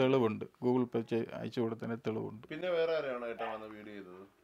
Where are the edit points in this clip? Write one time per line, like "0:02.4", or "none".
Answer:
none